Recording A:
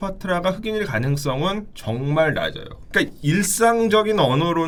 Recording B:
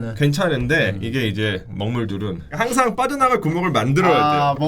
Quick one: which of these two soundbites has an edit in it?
B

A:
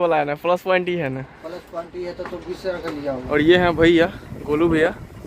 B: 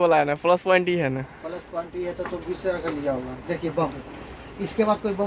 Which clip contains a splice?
A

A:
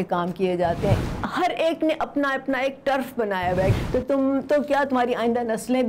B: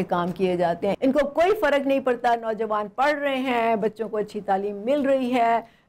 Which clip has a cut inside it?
A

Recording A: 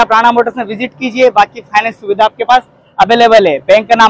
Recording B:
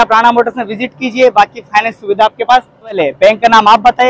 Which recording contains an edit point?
B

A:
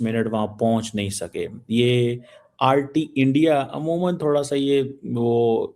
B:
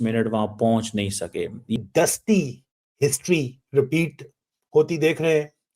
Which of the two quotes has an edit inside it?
B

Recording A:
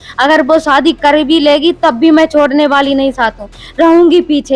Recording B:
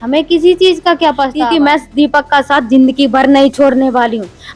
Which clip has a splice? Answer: B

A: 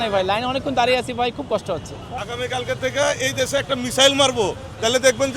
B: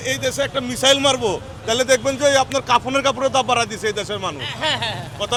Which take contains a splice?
A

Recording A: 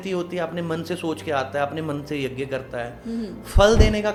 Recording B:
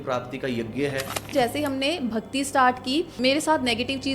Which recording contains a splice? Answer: B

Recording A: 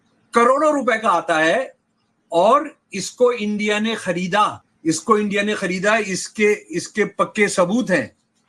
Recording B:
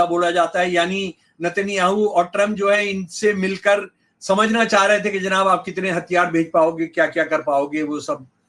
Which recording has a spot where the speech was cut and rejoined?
A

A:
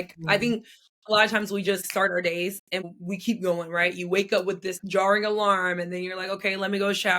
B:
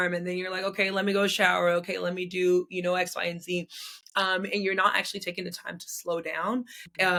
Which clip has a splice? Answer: A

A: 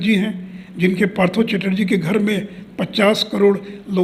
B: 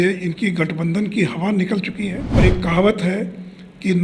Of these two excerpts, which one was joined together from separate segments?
B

